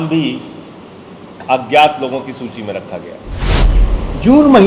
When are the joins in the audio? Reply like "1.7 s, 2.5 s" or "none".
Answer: 3.7 s